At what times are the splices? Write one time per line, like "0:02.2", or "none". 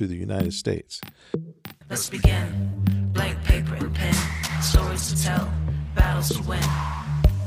0:01.6